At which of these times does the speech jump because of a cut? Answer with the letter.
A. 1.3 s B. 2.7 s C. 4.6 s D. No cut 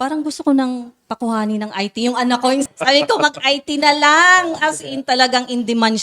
B